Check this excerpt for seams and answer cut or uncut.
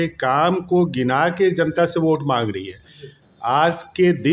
uncut